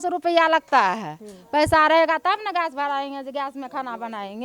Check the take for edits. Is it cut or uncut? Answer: uncut